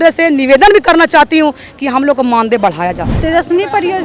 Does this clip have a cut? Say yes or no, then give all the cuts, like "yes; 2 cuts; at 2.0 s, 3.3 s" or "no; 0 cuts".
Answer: yes; 1 cut; at 3.1 s